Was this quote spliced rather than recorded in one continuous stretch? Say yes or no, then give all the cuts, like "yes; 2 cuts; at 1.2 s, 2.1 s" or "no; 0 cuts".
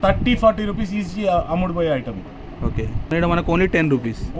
yes; 1 cut; at 3.1 s